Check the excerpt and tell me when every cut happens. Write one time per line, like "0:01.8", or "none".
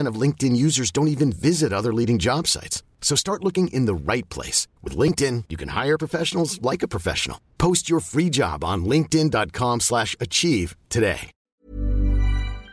0:11.5